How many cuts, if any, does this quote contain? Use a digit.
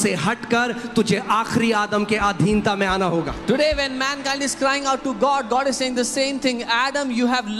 0